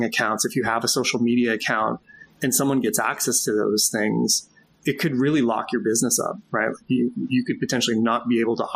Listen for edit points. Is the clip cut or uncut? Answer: uncut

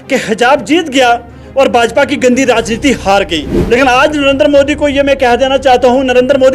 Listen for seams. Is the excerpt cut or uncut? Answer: cut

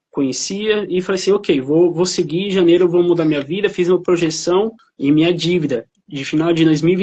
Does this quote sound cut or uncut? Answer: cut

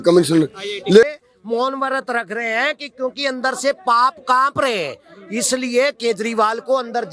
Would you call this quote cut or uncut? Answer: cut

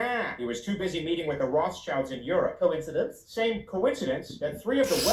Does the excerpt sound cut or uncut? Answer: cut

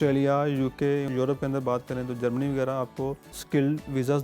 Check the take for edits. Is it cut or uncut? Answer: cut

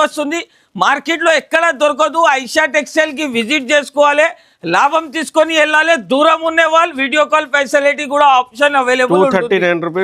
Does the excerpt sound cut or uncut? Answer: uncut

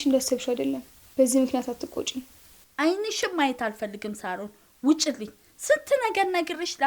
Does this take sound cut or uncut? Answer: uncut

